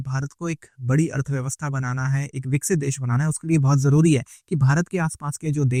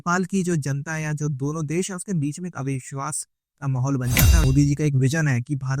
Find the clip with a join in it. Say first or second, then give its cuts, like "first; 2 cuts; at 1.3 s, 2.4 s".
second; 1 cut; at 4.4 s